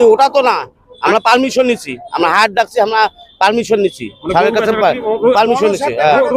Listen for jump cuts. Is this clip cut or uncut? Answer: uncut